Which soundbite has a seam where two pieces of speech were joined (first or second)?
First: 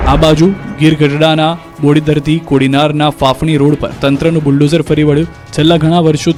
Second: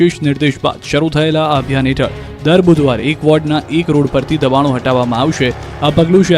second